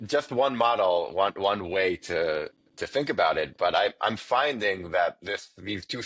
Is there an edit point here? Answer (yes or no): no